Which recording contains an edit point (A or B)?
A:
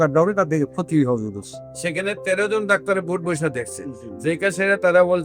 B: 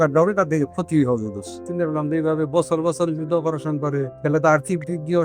B